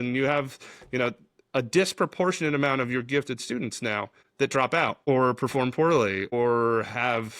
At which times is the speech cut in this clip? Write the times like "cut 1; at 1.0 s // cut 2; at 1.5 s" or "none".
cut 1; at 4.2 s // cut 2; at 5.0 s // cut 3; at 6.3 s